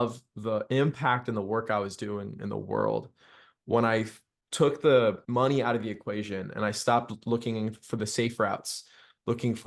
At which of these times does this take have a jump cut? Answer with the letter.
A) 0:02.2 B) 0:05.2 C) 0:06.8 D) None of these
B